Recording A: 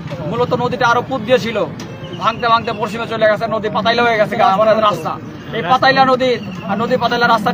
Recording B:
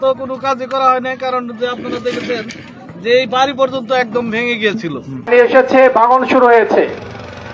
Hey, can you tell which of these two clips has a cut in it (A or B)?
B